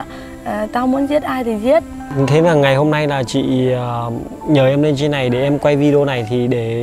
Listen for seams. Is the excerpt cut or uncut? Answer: cut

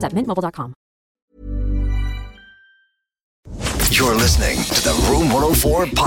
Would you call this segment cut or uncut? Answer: cut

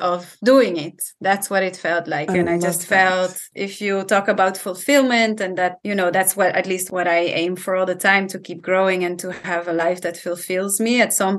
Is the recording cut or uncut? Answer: cut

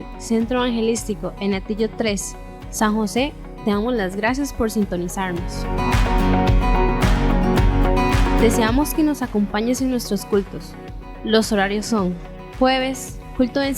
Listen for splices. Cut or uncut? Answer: cut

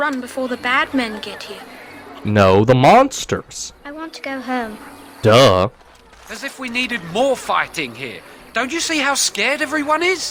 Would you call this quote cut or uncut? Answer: uncut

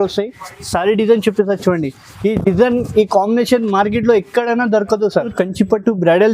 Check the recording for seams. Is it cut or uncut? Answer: cut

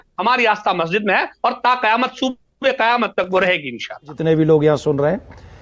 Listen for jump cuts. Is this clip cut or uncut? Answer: cut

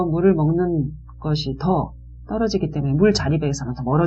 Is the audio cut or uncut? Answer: uncut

